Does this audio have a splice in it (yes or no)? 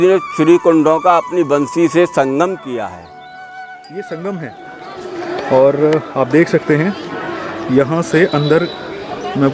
yes